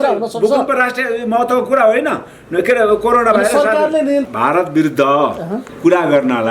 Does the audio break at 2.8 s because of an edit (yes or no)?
no